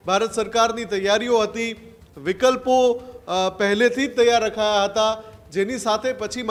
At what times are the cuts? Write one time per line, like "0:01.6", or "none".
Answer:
none